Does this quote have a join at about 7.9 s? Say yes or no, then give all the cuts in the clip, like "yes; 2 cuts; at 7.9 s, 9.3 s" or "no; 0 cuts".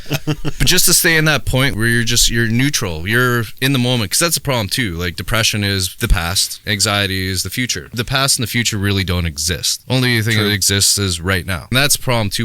yes; 5 cuts; at 1.7 s, 6.3 s, 7.9 s, 9.7 s, 11.7 s